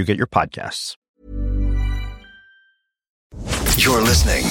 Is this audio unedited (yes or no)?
no